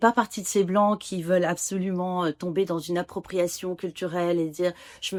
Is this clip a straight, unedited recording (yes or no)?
yes